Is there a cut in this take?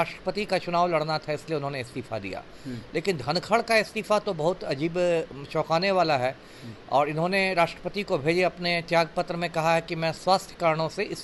no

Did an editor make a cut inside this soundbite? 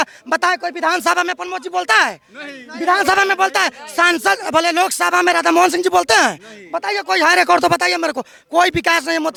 no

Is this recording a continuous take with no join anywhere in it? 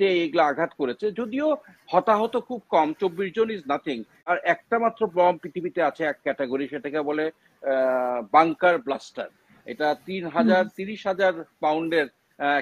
no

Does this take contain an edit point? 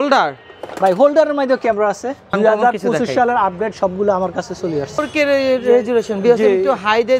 yes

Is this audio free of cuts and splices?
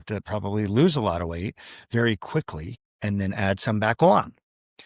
yes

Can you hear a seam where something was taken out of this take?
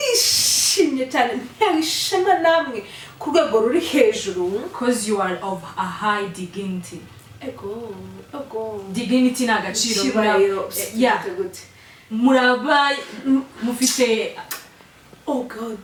no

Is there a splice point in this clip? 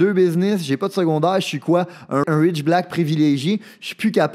yes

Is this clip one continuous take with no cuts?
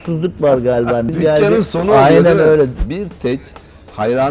no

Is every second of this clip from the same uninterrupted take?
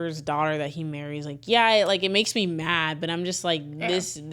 yes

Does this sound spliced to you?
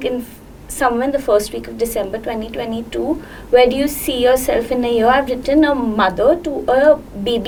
no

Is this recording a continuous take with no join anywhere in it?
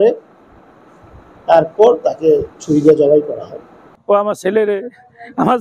no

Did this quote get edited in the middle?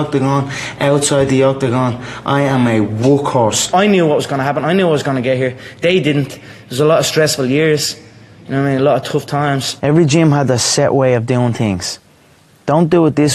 yes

